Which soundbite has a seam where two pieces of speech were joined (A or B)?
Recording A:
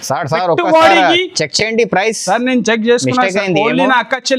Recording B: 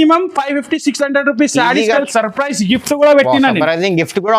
B